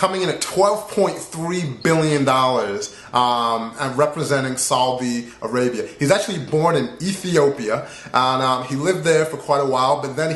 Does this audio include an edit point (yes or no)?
yes